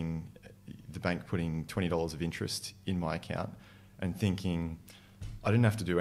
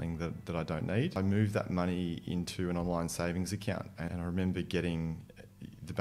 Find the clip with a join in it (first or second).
second